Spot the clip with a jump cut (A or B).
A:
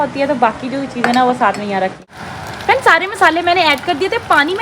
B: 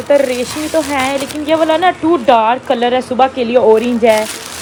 A